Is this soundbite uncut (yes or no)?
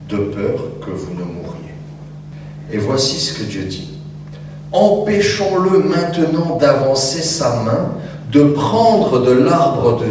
no